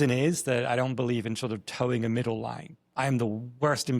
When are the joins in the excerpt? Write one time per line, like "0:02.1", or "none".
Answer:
none